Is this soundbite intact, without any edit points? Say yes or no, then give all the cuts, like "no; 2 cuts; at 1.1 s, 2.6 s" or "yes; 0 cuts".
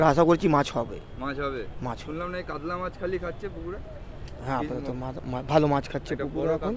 yes; 0 cuts